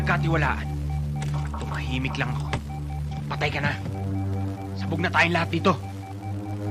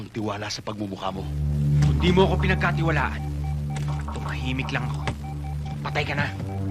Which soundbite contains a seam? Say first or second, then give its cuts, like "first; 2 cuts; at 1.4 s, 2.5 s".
second; 1 cut; at 1.3 s